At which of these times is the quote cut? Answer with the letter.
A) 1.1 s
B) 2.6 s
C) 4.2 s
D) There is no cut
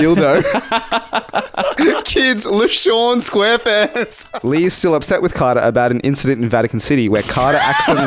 C